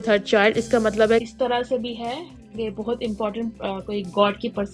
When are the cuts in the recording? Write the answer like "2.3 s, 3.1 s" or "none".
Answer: 1.2 s